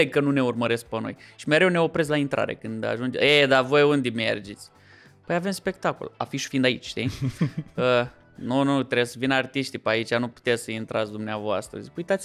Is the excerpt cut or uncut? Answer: uncut